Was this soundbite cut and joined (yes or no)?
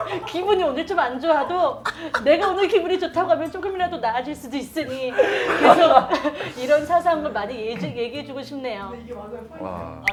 no